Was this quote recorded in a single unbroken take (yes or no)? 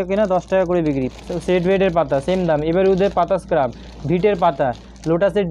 yes